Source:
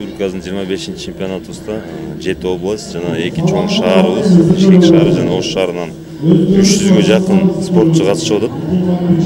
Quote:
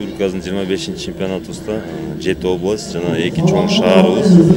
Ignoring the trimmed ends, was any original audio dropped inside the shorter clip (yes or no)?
no